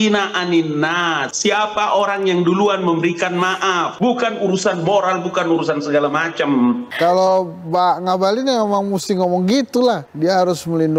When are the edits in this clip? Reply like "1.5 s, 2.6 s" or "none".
6.9 s